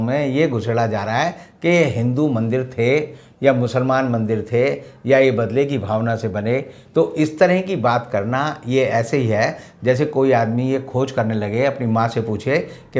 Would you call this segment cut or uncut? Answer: uncut